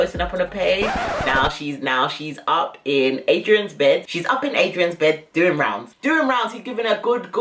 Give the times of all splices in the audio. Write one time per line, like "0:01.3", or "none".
none